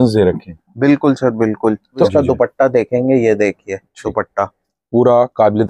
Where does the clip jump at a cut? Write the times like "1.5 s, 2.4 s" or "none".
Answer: 2.1 s